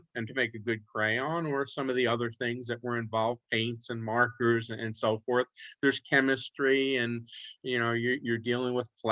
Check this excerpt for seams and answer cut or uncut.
uncut